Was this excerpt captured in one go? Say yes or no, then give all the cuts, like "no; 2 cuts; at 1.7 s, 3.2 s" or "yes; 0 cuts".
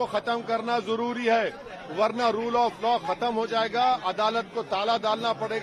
yes; 0 cuts